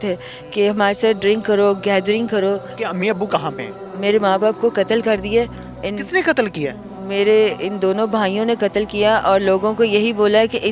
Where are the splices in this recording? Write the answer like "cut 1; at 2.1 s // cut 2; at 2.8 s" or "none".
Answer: cut 1; at 2.7 s